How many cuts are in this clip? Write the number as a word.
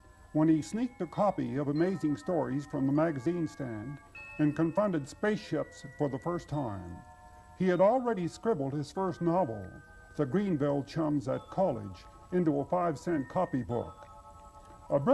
one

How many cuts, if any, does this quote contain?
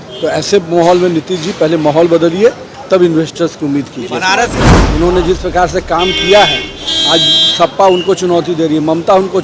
one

